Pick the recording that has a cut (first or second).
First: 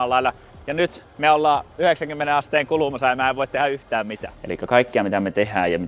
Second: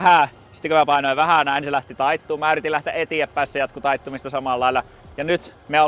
first